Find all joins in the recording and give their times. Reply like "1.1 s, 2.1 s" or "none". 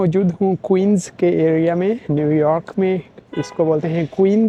none